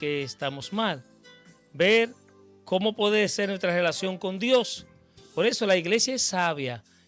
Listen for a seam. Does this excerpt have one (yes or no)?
no